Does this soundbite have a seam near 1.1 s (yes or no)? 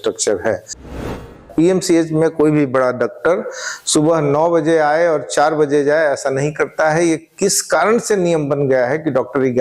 yes